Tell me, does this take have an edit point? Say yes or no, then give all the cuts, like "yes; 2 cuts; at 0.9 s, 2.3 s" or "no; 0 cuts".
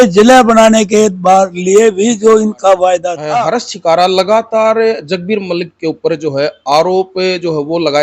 yes; 1 cut; at 3.4 s